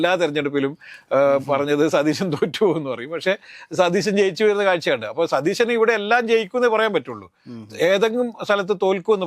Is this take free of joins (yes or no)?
yes